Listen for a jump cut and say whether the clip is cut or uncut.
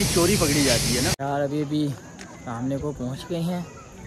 cut